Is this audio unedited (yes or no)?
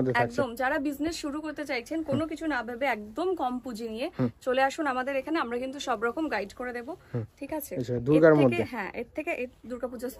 yes